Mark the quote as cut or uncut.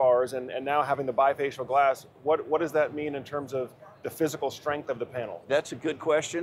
uncut